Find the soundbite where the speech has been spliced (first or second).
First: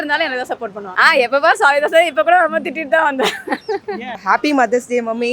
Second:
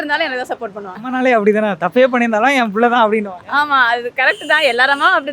first